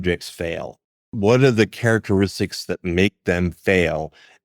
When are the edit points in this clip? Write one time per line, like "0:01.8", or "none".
0:01.0